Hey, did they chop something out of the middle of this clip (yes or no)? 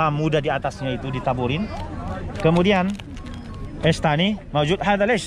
no